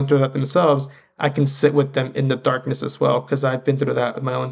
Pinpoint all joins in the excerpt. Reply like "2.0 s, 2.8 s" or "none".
none